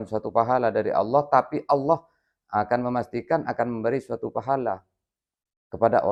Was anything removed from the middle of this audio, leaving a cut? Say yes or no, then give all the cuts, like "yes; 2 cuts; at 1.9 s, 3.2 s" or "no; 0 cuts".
no; 0 cuts